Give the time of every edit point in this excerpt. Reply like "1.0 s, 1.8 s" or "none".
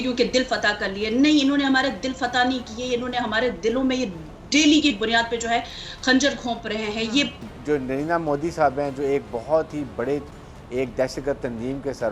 7.4 s